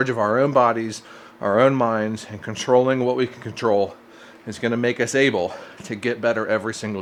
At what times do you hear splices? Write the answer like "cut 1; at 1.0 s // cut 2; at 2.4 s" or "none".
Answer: none